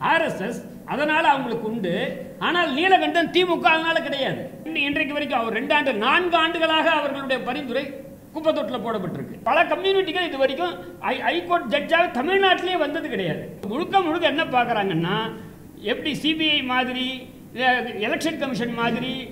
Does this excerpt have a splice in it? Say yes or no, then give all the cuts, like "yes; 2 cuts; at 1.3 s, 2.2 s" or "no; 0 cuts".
yes; 3 cuts; at 4.7 s, 9.4 s, 13.7 s